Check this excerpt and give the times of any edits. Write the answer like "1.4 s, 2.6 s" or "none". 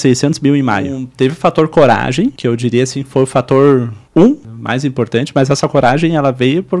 1.0 s, 2.4 s, 4.0 s, 4.5 s